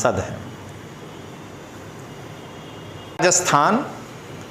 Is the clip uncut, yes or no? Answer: no